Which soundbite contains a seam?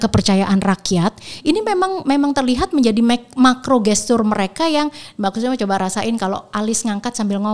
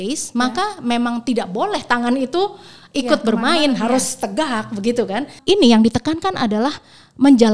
second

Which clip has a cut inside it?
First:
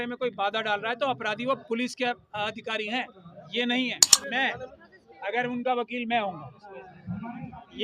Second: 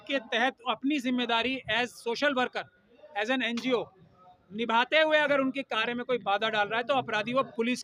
first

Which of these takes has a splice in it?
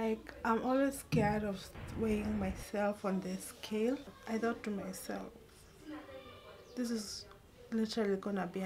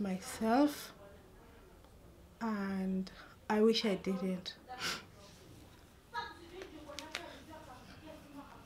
first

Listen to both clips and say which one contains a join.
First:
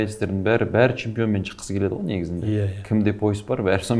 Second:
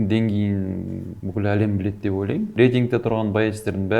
second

